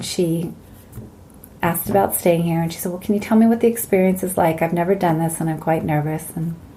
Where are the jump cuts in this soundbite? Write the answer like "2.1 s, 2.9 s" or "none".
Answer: none